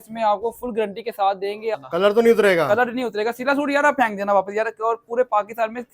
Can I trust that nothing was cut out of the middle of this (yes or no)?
no